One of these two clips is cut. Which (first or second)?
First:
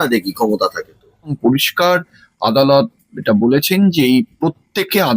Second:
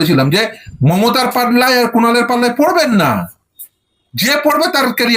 first